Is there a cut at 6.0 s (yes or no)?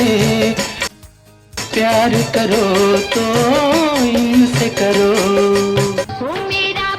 yes